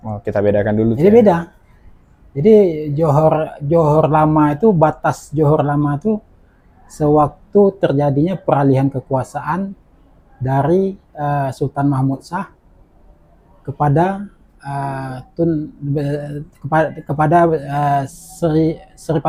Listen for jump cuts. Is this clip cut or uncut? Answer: uncut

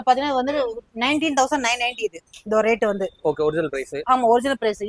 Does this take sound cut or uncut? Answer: uncut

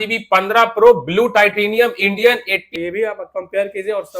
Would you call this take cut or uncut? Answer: cut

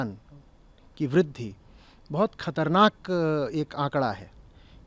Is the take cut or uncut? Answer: uncut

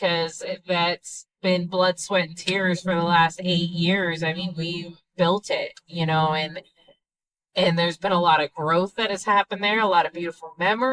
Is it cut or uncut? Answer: uncut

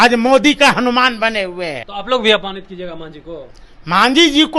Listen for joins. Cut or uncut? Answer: cut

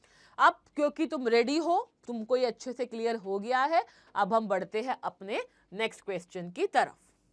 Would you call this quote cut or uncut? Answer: uncut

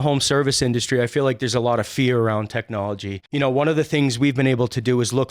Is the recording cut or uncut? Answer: cut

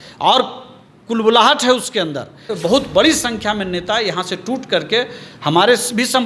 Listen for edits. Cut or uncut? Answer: cut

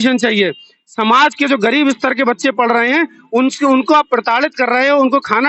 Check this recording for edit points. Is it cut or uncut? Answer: uncut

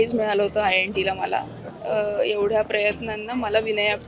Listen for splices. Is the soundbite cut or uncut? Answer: cut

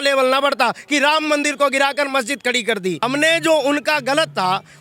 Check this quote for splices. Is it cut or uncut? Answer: cut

